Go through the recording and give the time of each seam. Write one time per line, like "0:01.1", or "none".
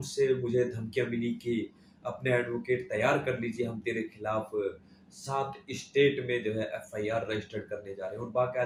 none